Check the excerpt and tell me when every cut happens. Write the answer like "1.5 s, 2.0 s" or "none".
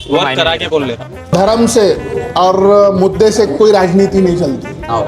1.3 s